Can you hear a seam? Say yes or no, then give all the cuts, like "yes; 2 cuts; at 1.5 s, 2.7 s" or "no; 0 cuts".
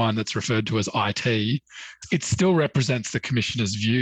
no; 0 cuts